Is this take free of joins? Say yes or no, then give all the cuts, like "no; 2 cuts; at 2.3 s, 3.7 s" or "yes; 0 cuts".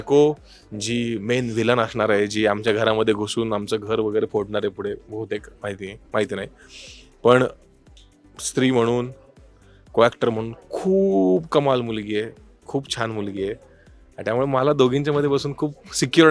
yes; 0 cuts